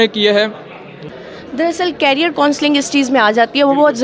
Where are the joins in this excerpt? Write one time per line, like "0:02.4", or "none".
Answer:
0:01.1